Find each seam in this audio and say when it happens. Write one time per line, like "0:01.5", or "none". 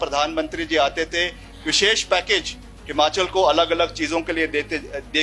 none